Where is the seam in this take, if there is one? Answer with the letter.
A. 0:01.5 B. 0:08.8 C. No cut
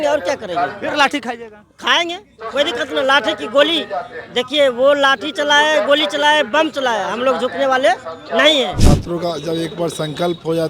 B